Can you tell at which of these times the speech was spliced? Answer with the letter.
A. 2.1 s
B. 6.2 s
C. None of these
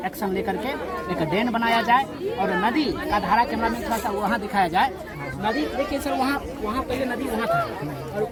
C